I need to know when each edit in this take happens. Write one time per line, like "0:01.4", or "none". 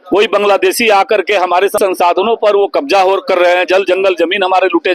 0:01.8